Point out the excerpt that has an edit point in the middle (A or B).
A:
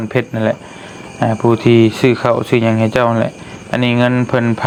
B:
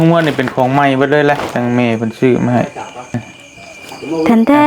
B